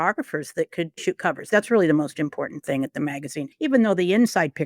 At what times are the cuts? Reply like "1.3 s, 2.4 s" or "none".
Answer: 1.0 s, 3.5 s